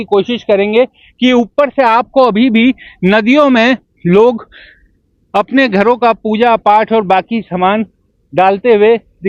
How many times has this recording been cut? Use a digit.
0